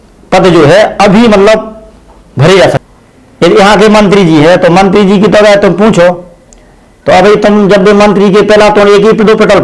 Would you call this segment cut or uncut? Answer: cut